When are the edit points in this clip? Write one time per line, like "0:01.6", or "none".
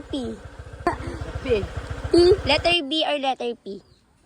0:00.9
0:02.4